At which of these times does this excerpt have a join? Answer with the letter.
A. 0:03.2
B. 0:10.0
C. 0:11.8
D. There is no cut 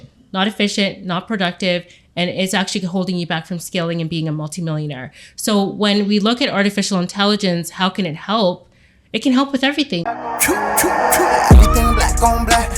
B